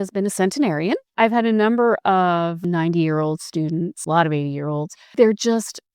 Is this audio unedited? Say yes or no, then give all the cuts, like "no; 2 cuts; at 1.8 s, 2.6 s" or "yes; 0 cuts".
no; 4 cuts; at 1.1 s, 2.6 s, 4.0 s, 5.1 s